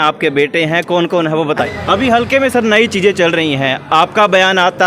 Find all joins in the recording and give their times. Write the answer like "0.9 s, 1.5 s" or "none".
1.6 s